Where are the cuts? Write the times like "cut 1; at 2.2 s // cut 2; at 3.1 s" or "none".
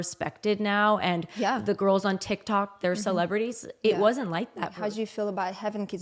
cut 1; at 4.7 s